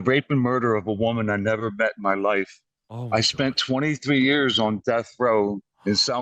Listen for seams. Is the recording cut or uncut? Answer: uncut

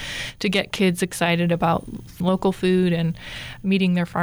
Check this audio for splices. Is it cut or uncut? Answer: cut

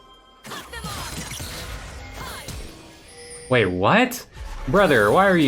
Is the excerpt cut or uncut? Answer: uncut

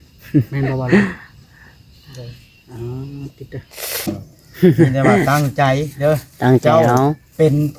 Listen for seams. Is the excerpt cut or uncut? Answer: cut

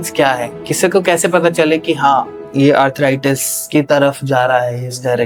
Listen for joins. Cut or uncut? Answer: uncut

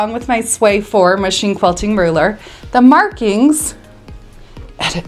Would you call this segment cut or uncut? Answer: uncut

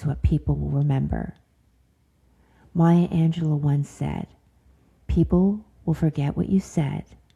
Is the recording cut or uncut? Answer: uncut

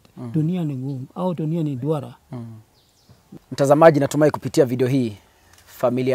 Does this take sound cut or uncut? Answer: cut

